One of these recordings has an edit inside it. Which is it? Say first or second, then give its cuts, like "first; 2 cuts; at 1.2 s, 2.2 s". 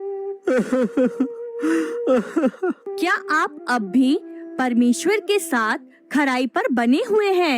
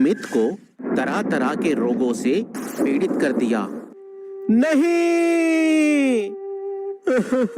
first; 1 cut; at 2.9 s